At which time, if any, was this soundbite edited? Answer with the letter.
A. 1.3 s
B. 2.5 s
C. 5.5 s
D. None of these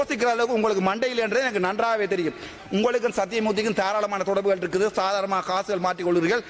B